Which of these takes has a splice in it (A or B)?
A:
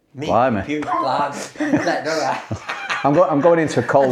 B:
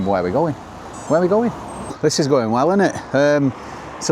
B